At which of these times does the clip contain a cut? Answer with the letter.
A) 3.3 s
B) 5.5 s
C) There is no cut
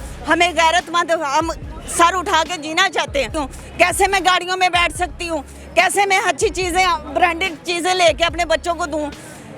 A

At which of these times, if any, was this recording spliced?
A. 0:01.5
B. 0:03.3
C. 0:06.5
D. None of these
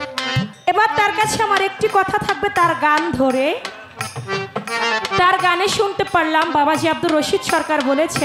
D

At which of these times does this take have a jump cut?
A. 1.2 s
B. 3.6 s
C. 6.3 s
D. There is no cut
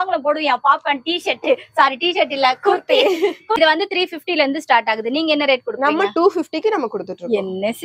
B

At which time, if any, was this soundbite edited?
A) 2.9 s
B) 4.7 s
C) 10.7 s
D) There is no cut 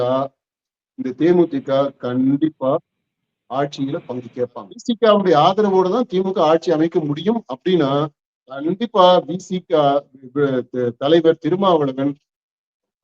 B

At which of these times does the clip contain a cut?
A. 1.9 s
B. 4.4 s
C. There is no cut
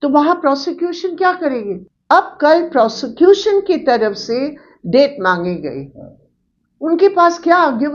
A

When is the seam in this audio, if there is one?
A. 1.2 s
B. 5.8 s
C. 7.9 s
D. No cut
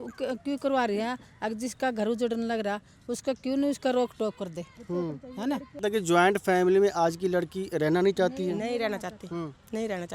B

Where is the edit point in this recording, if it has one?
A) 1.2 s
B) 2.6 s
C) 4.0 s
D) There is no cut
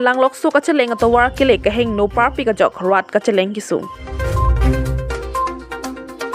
C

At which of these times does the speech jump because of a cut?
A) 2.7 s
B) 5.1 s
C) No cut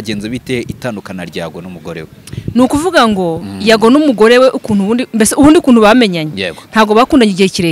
C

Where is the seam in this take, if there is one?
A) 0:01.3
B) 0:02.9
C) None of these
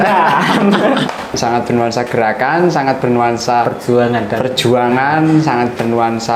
A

